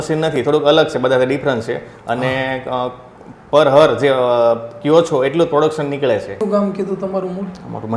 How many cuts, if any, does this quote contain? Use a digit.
1